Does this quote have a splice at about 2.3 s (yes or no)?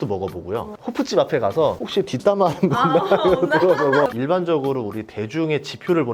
no